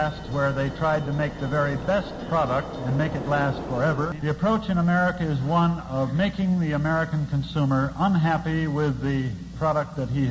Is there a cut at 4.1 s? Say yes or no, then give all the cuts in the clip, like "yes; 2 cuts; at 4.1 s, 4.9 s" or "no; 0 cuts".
yes; 1 cut; at 4.1 s